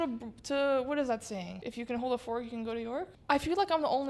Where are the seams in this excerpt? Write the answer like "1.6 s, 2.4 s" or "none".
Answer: 1.6 s, 3.1 s